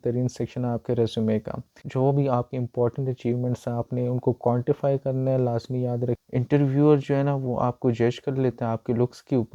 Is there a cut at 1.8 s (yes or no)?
yes